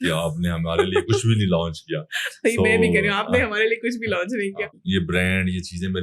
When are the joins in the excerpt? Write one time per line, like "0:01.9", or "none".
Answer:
0:04.8